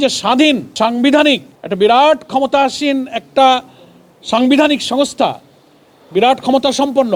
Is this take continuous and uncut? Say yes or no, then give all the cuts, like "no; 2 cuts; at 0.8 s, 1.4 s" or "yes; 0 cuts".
yes; 0 cuts